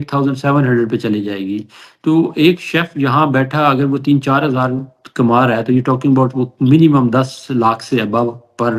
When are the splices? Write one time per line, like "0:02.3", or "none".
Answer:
none